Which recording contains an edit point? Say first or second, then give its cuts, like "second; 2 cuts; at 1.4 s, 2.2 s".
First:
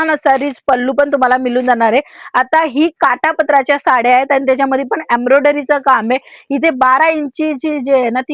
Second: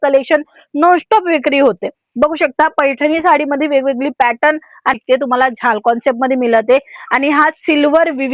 second; 1 cut; at 5.0 s